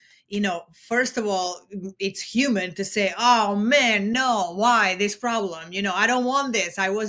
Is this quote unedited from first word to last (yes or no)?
yes